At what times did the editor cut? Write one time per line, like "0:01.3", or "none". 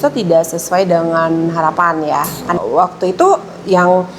0:02.6